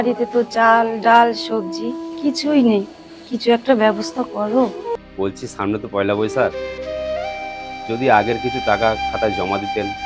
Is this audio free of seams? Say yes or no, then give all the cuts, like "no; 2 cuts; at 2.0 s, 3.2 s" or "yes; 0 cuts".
no; 1 cut; at 4.9 s